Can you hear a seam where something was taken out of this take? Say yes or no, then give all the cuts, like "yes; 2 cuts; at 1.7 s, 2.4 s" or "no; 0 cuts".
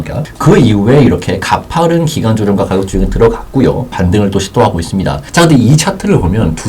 yes; 2 cuts; at 3.9 s, 5.2 s